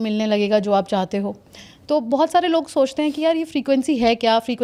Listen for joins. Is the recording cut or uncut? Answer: uncut